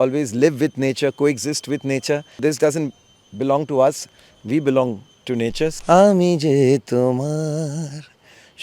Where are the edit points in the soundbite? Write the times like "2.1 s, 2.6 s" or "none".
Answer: 2.4 s, 5.8 s